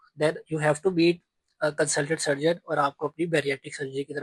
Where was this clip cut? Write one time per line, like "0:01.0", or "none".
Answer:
none